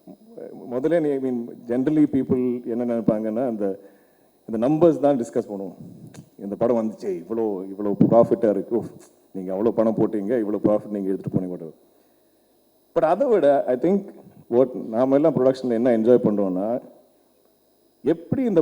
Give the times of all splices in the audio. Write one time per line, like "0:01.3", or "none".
none